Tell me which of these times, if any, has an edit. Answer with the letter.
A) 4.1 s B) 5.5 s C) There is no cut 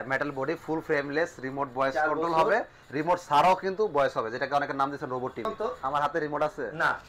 B